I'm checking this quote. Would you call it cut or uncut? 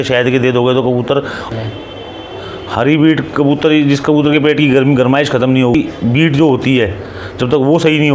cut